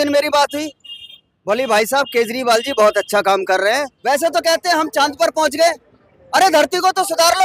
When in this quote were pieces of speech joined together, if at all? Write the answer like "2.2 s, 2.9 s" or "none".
3.9 s

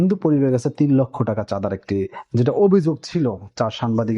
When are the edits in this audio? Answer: none

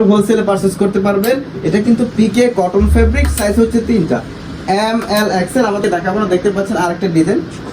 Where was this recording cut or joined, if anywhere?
5.8 s

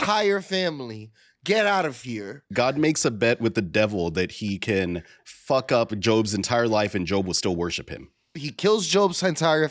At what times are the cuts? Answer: 2.4 s, 8.4 s

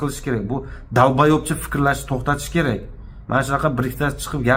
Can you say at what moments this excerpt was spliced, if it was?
none

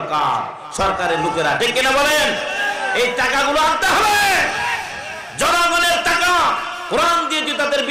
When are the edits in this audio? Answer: none

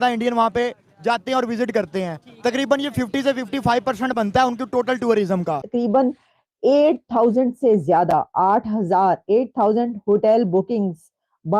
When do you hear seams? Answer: 5.6 s

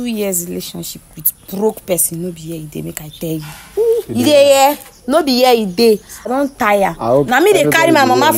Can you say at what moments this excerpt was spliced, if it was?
6.3 s

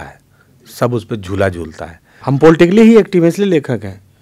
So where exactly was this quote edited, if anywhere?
2.2 s

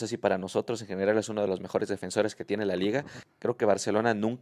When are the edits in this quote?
3.2 s

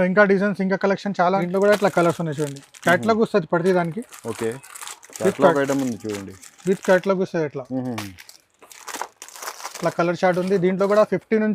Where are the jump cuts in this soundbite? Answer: 1.4 s

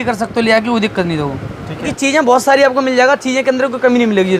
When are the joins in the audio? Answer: 1.9 s

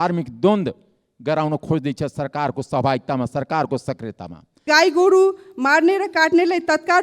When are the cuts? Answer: 4.7 s

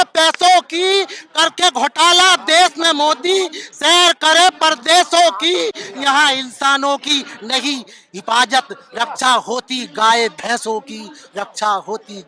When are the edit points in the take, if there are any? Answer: none

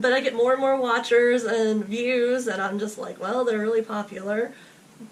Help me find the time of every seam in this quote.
none

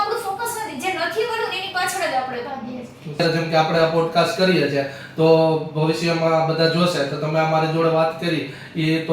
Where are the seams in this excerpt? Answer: 3.2 s

